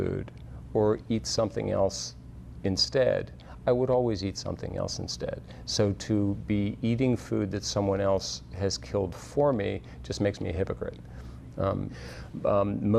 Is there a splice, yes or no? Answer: no